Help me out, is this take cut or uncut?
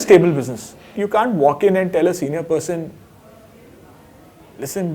cut